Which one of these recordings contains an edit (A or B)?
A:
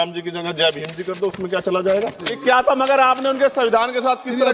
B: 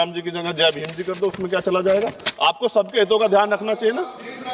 A